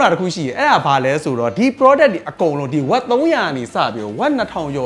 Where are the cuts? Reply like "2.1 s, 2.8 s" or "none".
none